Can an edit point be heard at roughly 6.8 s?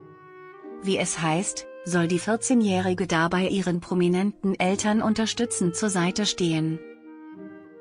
yes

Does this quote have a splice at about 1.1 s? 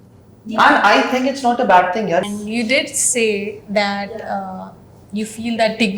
no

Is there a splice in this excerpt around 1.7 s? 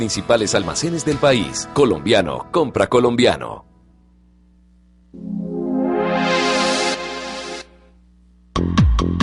no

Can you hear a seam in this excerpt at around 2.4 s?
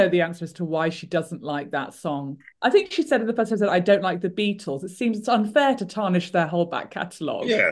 no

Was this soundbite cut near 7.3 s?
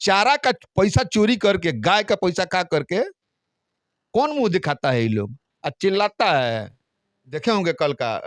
yes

